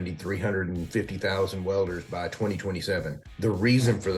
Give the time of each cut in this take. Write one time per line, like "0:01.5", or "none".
0:03.2